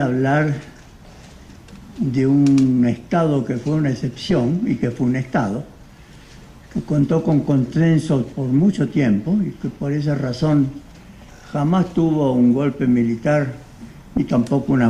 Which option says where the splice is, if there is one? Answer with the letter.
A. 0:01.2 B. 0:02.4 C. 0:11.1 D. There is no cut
D